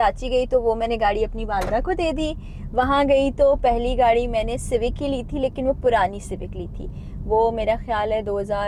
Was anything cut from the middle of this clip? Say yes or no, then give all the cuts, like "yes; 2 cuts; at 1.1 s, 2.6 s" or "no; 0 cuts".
no; 0 cuts